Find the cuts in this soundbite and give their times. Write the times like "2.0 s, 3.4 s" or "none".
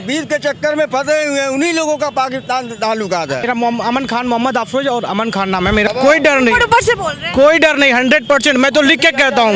3.4 s, 5.9 s